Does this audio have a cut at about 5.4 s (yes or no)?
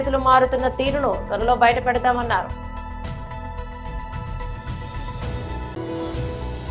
yes